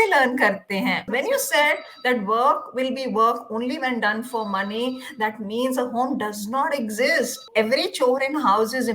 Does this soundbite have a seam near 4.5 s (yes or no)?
no